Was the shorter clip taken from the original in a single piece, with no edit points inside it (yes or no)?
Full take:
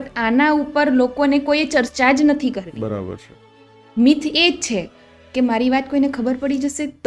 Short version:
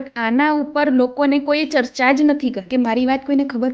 no